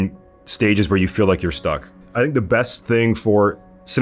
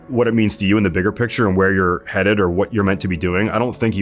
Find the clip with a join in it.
first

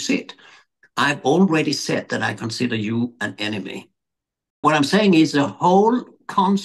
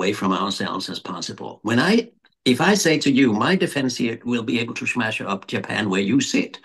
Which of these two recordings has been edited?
first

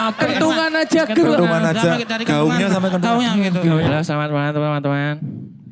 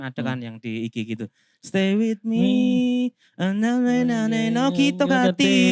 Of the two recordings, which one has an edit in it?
first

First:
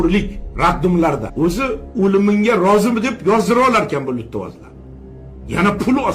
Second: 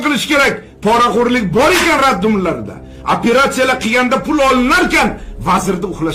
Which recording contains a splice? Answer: first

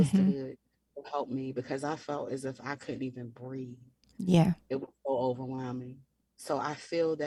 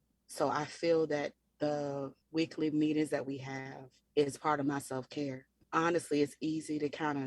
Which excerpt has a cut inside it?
second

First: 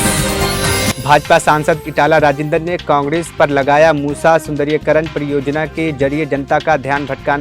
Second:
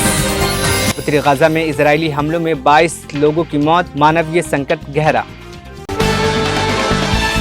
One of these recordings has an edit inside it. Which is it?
first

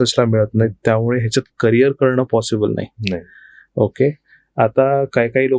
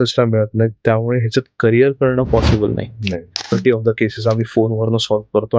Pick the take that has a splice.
second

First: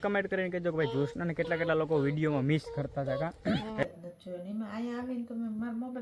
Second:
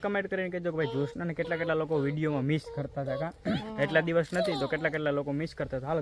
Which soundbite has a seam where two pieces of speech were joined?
first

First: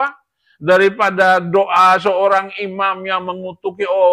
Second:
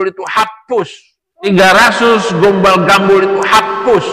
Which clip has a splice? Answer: second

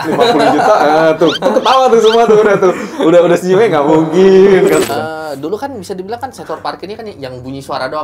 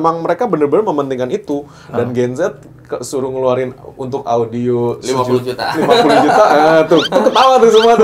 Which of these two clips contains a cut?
first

